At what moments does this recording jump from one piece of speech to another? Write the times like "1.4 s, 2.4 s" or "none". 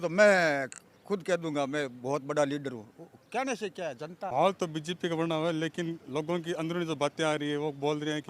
4.3 s